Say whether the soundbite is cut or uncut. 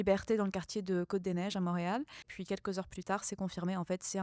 cut